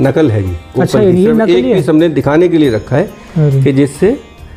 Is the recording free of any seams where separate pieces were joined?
yes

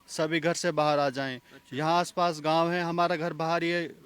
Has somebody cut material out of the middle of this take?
no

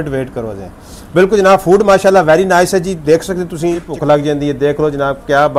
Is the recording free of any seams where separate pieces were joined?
no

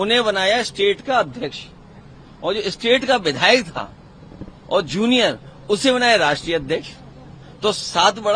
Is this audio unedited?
yes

